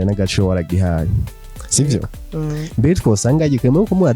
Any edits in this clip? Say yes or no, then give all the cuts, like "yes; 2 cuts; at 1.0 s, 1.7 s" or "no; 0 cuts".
no; 0 cuts